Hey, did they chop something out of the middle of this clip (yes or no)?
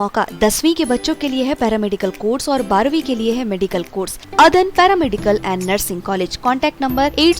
yes